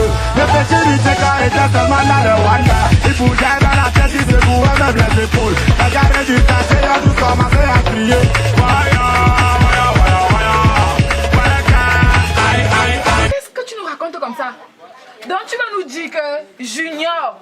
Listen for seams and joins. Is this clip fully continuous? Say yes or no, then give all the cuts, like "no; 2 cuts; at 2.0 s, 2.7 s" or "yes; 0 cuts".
no; 1 cut; at 13.3 s